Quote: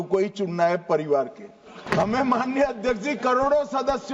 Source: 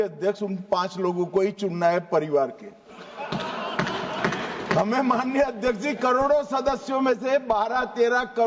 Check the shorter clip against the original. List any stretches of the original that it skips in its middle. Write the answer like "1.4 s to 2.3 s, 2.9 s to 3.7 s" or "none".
3.0 s to 4.5 s